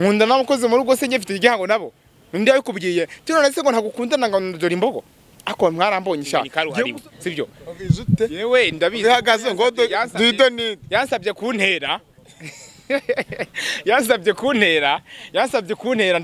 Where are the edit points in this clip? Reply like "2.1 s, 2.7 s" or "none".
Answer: 6.5 s